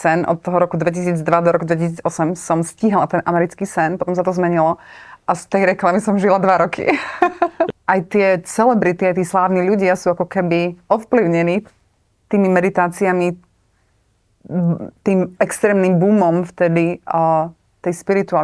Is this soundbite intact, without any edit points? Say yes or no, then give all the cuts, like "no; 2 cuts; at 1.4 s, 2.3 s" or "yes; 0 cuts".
no; 1 cut; at 7.7 s